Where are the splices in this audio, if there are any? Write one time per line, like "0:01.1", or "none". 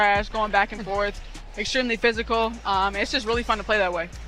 none